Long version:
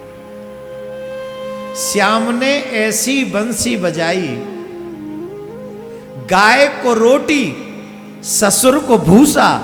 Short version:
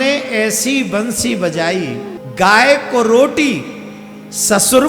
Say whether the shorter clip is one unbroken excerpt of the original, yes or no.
no